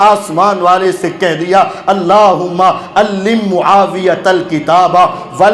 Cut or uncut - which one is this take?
uncut